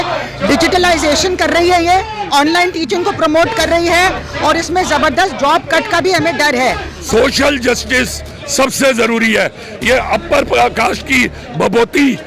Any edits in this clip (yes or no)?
yes